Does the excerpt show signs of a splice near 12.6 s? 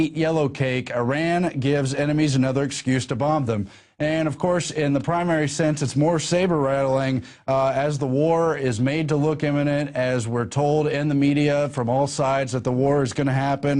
no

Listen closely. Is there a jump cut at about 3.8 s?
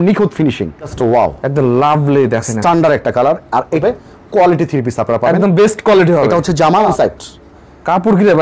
yes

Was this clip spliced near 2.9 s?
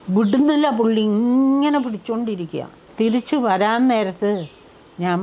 yes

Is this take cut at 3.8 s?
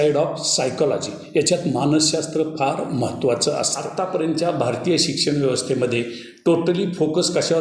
yes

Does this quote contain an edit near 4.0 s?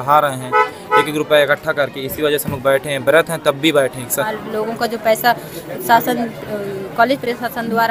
yes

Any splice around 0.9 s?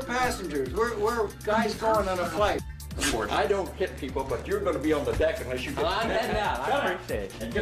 no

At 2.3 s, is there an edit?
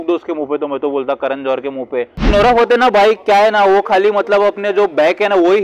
yes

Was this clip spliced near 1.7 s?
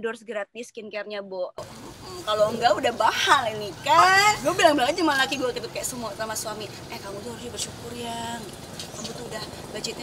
no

